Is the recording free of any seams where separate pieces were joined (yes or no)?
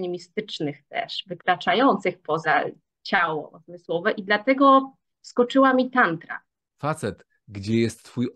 no